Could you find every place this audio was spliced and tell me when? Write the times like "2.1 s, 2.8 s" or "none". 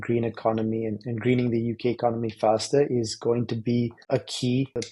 4.0 s